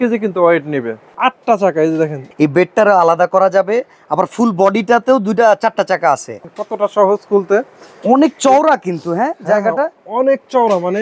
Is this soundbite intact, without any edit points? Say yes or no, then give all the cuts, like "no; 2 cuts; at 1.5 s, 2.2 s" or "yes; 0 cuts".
no; 3 cuts; at 1.1 s, 2.2 s, 6.4 s